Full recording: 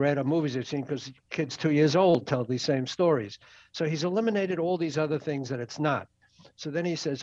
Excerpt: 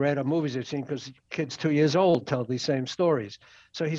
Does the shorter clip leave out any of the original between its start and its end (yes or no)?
no